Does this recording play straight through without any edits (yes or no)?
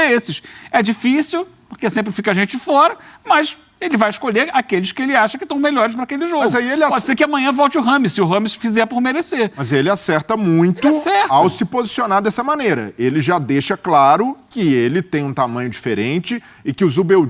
yes